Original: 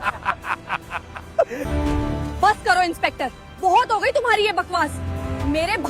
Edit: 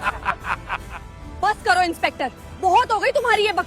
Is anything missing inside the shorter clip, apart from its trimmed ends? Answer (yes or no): yes